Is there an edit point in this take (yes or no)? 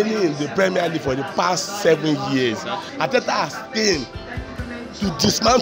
yes